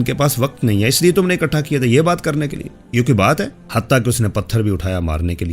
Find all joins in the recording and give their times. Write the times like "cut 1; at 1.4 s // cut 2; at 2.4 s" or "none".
cut 1; at 3.6 s